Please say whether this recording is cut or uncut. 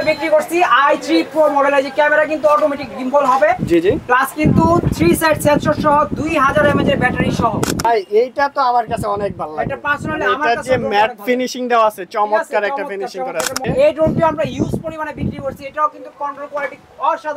cut